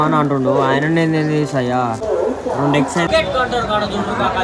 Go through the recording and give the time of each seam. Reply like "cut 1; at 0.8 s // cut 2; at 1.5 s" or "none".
none